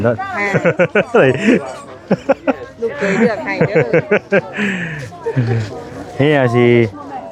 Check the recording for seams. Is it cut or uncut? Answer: uncut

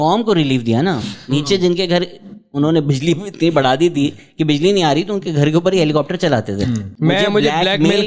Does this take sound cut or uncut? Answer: cut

